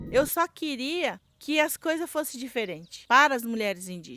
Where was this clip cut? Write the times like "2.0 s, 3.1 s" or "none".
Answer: 1.3 s, 2.9 s